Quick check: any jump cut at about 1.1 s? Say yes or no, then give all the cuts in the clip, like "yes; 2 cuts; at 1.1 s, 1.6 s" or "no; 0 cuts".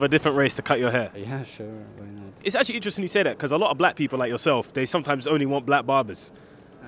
yes; 2 cuts; at 1.1 s, 2.3 s